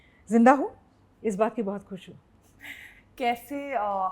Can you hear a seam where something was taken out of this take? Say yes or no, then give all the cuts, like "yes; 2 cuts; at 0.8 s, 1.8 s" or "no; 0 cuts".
no; 0 cuts